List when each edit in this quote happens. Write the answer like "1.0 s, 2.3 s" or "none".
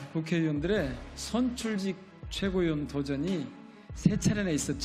none